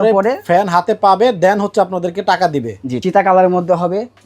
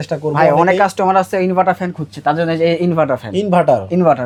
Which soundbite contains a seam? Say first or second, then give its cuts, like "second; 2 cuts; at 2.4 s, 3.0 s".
first; 1 cut; at 2.8 s